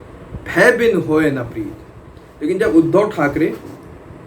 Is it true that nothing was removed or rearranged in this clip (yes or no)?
no